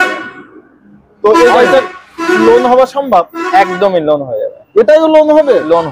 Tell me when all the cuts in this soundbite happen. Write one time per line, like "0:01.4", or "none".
none